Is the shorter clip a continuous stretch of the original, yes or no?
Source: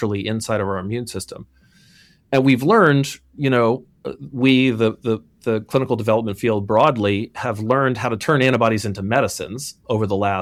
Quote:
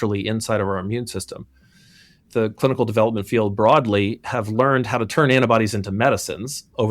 no